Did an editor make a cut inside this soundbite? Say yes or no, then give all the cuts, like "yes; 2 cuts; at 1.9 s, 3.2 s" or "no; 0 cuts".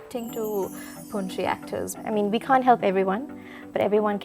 yes; 1 cut; at 1.9 s